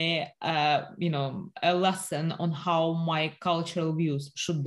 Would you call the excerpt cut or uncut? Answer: uncut